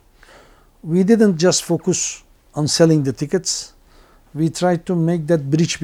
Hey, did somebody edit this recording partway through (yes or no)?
no